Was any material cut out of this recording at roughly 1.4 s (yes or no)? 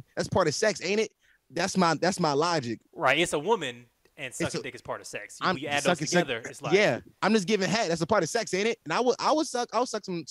no